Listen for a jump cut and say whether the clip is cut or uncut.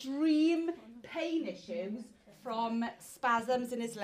uncut